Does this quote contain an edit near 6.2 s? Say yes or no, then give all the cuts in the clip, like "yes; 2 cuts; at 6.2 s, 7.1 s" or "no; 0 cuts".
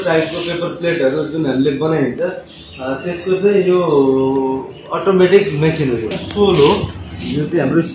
yes; 1 cut; at 6.2 s